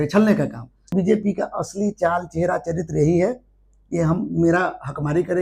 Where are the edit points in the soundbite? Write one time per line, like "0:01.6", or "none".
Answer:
0:00.9